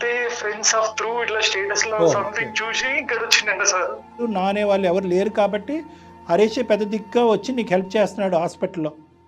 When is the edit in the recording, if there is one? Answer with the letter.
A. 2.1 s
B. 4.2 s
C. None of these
B